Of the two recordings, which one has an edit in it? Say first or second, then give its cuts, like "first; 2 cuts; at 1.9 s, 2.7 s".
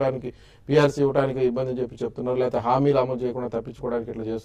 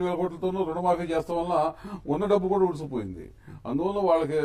first; 1 cut; at 2.5 s